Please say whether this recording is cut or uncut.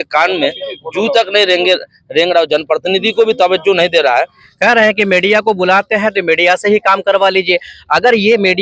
cut